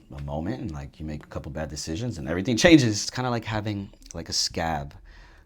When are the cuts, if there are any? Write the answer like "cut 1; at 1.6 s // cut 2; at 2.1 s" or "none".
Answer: cut 1; at 3.1 s